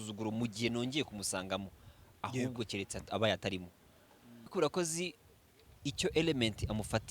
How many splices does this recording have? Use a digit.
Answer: 1